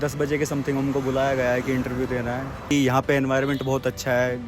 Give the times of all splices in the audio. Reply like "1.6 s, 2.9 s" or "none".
2.7 s